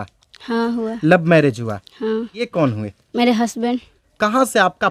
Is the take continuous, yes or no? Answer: no